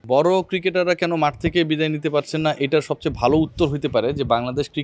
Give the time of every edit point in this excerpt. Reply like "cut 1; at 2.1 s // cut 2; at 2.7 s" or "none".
none